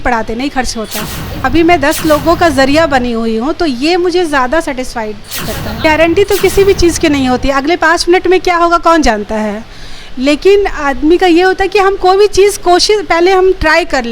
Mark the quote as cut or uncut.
cut